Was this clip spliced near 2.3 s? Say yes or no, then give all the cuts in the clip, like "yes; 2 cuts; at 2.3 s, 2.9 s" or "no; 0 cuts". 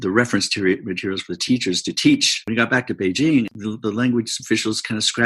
yes; 2 cuts; at 2.3 s, 3.5 s